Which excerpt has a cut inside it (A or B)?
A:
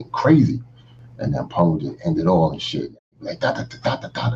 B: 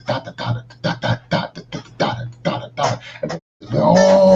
A